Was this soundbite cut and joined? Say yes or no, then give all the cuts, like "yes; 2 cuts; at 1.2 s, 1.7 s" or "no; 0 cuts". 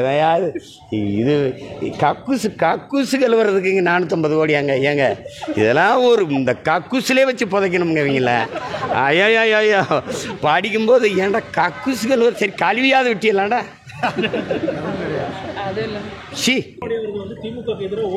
yes; 1 cut; at 16.8 s